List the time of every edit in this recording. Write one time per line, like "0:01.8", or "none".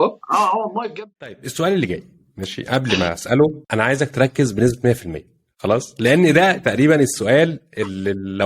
0:01.0